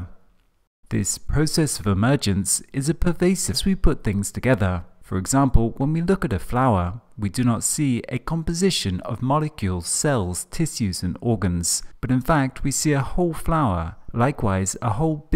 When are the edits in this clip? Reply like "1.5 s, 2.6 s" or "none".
none

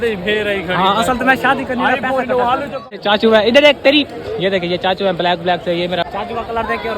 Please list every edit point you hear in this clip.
3.0 s, 6.0 s

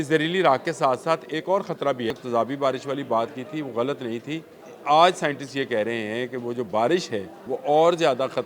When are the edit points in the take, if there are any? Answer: 2.1 s, 4.6 s, 7.3 s

